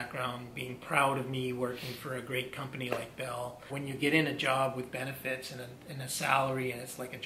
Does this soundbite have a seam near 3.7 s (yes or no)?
yes